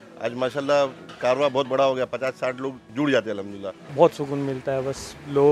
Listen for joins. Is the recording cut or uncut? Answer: cut